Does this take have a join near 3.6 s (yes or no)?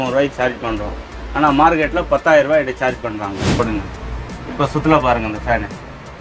yes